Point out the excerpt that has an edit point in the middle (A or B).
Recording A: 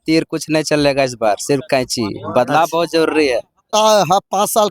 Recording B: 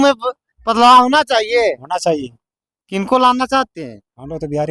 A